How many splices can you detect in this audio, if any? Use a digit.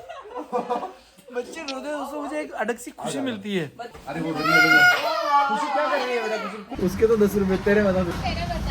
2